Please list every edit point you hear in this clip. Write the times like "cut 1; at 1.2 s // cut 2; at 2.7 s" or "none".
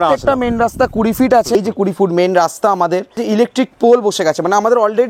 cut 1; at 1.5 s // cut 2; at 3.2 s